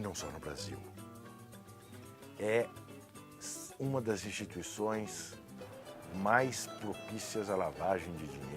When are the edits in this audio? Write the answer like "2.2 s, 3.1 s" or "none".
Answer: none